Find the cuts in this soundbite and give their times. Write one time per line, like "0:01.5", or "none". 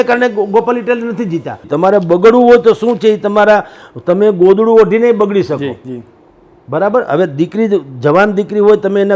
0:01.7